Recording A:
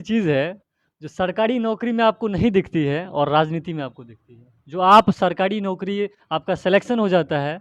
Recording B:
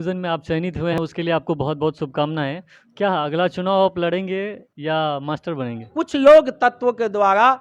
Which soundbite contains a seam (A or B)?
B